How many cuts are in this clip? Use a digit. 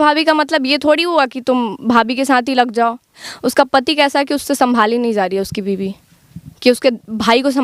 1